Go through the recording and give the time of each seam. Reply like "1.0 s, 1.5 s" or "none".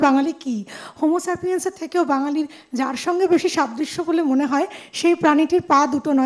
none